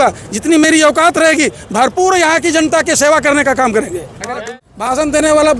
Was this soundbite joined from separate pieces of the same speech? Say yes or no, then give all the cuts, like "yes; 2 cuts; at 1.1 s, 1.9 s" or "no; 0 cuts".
yes; 1 cut; at 4.2 s